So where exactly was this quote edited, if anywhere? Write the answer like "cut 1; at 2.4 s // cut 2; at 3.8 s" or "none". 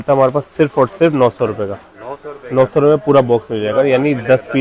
none